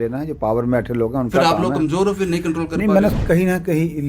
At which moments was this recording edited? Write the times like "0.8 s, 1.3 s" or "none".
3.1 s